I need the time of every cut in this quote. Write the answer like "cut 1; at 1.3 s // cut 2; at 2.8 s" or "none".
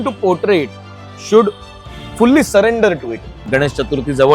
cut 1; at 3.4 s

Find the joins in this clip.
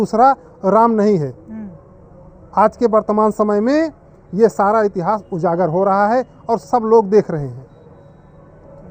none

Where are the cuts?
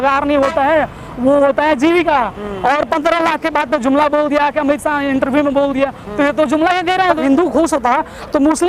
cut 1; at 7.2 s

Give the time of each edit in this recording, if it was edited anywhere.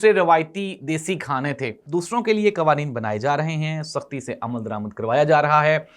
cut 1; at 1.8 s

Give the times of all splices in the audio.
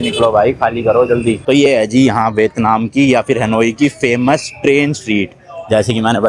cut 1; at 1.4 s

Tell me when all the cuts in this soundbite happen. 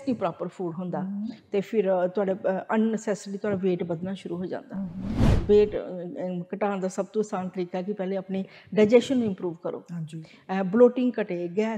cut 1; at 5.3 s

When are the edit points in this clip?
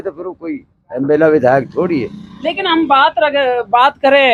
none

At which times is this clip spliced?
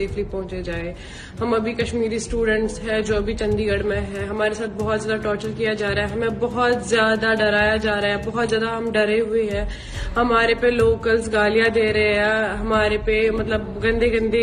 none

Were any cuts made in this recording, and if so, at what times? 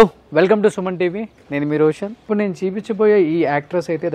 cut 1; at 2.2 s

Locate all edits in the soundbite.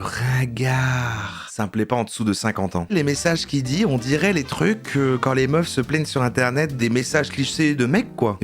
cut 1; at 1.4 s // cut 2; at 2.9 s // cut 3; at 6.8 s

